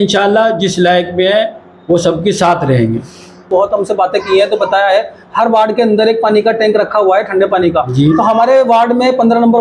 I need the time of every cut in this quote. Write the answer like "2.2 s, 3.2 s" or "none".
3.4 s